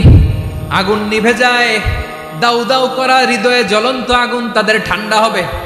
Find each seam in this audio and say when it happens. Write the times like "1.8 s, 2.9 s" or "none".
none